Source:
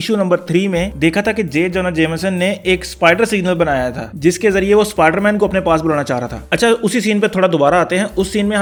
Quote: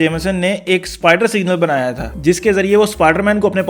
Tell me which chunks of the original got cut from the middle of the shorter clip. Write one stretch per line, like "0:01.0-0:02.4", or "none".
none